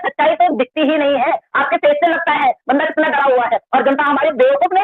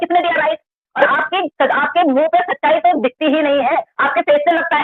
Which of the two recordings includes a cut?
second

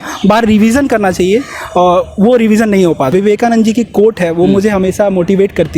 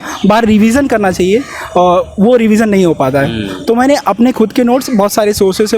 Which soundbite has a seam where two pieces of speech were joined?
first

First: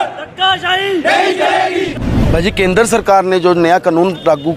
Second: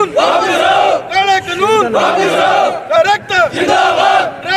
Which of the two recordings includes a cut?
first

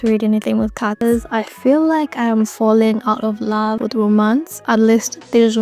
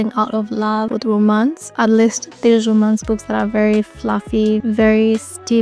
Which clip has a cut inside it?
first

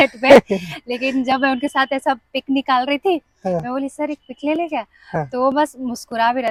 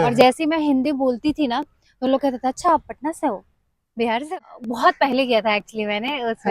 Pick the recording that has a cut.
second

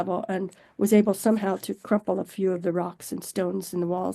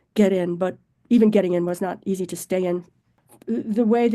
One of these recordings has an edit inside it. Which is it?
second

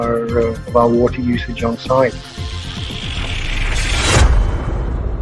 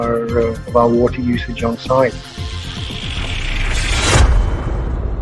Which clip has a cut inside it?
first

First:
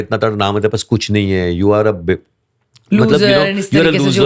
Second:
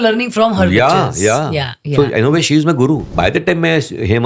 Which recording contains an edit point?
second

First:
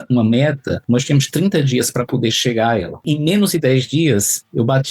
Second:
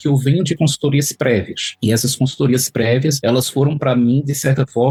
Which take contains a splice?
first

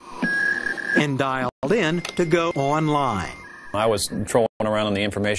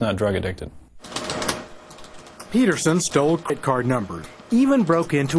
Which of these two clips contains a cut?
first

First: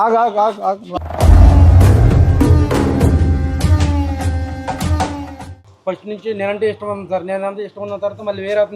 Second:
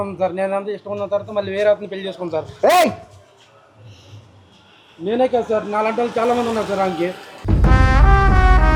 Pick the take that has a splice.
first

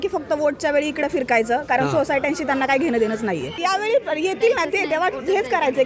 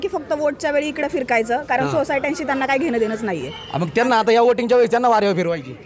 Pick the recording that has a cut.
first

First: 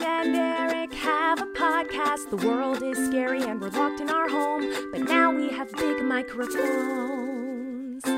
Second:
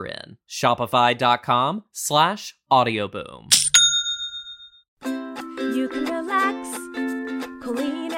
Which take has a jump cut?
second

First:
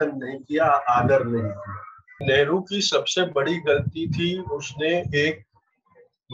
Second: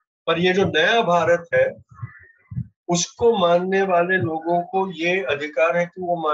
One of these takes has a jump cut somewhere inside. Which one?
first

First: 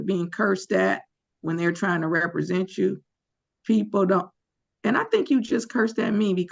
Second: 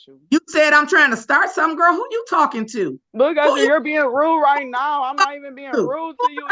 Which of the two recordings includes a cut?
second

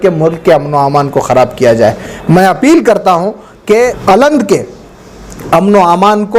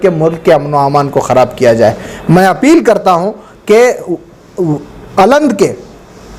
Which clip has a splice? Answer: first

